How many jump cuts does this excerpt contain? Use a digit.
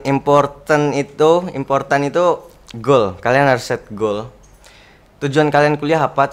0